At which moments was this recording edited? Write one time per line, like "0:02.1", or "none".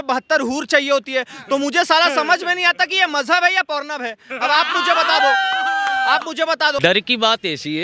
0:06.8